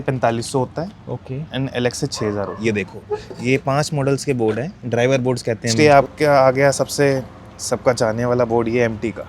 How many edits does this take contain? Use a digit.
2